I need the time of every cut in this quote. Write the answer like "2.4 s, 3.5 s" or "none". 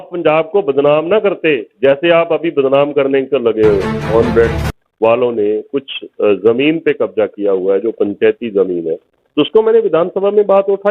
4.1 s